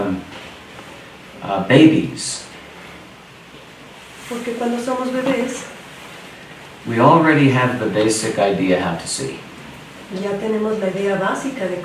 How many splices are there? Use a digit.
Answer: 1